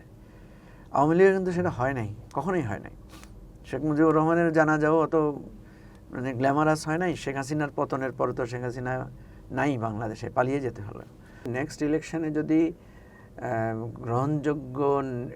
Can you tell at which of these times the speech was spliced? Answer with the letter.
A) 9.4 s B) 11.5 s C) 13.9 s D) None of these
B